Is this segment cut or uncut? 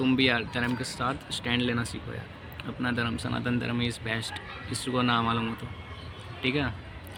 uncut